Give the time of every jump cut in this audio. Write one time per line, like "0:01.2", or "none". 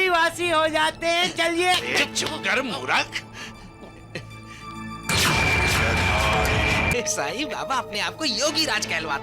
0:06.9